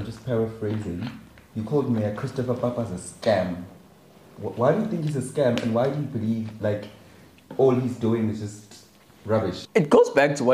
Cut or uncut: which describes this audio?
cut